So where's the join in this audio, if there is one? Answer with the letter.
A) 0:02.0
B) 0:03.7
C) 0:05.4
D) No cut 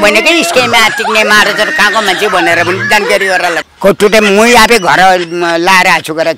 B